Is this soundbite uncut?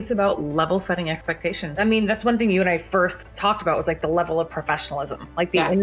yes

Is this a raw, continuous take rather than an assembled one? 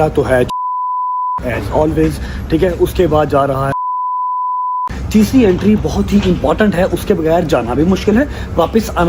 yes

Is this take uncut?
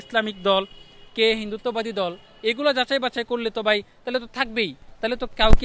yes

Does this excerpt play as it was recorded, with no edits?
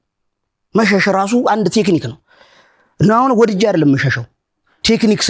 yes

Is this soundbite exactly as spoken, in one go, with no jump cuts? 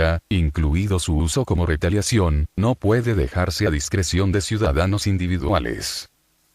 no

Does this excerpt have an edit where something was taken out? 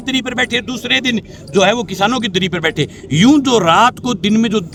no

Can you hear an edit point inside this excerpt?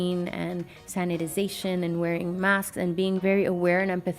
yes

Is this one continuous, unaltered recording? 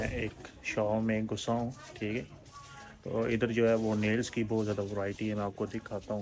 yes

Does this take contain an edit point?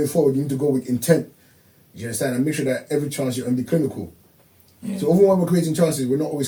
no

